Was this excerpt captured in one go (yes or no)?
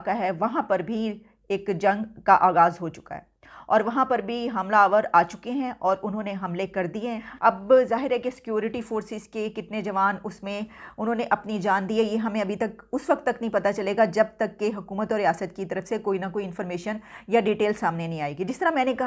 yes